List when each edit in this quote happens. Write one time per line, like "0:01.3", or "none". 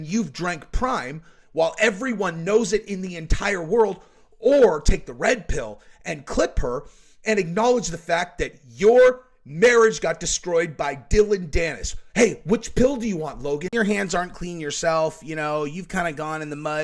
0:13.6